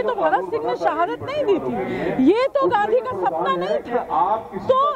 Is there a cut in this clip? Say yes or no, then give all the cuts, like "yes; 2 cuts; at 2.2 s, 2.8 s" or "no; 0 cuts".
no; 0 cuts